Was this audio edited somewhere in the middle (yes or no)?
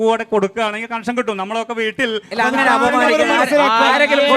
yes